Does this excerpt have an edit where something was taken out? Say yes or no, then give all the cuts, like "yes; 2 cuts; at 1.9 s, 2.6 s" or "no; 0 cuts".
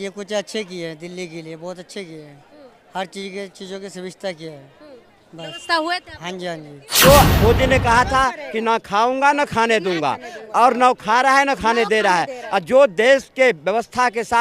yes; 1 cut; at 6.8 s